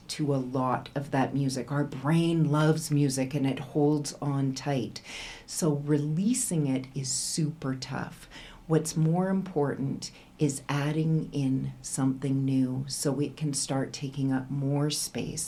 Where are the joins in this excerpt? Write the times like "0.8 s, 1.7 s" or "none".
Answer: none